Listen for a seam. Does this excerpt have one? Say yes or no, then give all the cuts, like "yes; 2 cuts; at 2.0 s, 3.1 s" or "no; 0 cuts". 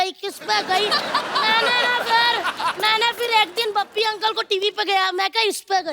yes; 1 cut; at 2.7 s